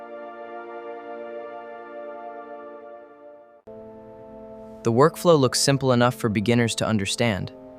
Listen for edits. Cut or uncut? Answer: cut